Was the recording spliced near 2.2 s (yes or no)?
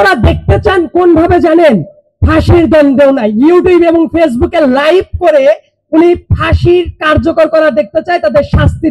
no